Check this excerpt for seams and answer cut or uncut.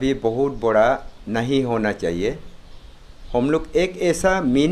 uncut